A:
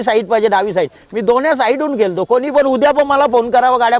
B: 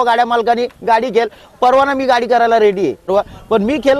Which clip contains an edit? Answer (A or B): B